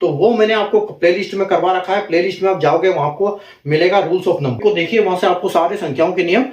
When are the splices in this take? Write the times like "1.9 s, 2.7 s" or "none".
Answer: 4.6 s